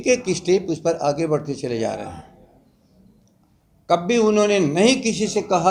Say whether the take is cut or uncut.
uncut